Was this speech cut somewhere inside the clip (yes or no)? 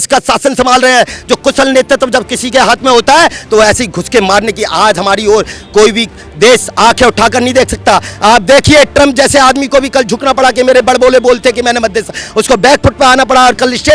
no